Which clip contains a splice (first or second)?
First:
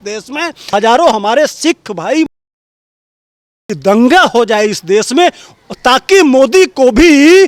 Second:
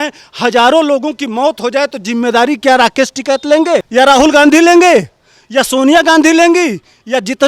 second